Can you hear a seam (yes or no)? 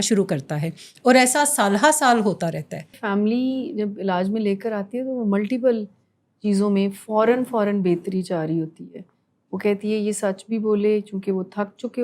yes